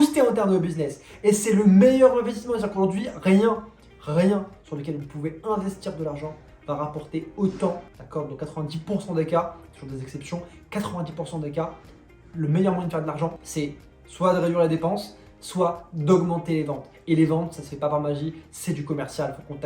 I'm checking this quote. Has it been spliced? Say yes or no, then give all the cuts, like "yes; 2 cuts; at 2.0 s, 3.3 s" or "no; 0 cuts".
no; 0 cuts